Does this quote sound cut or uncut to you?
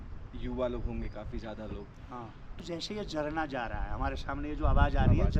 cut